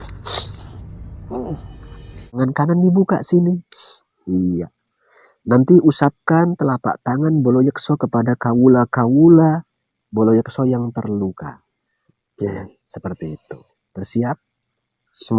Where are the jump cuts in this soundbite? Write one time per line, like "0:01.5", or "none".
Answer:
0:02.4